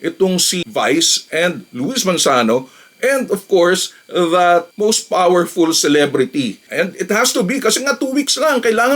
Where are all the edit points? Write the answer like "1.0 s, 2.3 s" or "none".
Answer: 6.7 s